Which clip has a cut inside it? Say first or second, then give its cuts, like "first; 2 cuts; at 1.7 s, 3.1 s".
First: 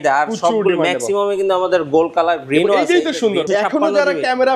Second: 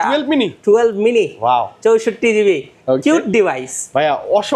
first; 1 cut; at 3.5 s